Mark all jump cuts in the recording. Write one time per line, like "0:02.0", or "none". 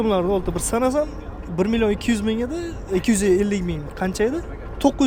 none

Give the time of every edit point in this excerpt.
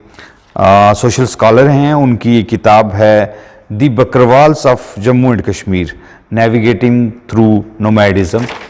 none

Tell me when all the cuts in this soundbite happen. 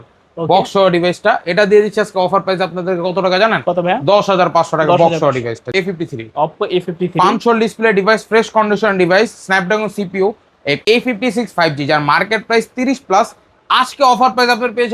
0:05.7
0:10.8

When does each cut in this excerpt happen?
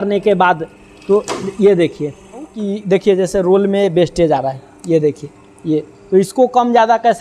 0:02.6

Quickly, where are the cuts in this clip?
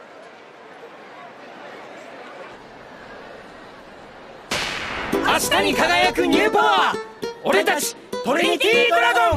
0:02.1
0:04.5

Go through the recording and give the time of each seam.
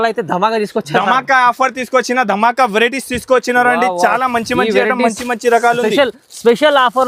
none

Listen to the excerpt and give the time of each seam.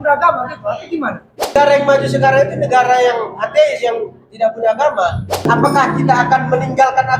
0:01.5
0:05.5

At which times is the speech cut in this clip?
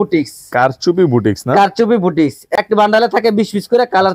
0:02.5

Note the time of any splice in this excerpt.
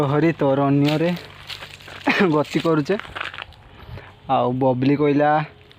none

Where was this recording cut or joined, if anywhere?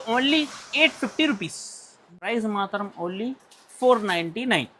0:02.3

